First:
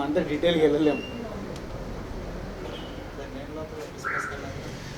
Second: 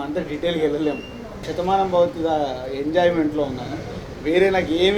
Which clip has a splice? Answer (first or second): second